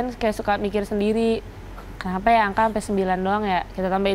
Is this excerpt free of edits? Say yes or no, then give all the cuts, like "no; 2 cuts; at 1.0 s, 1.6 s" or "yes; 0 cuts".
yes; 0 cuts